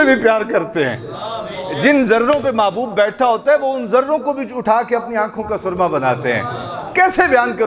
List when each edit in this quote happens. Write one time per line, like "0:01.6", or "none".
none